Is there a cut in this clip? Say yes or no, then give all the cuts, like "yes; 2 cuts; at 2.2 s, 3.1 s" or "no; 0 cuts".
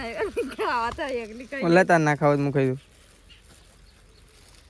no; 0 cuts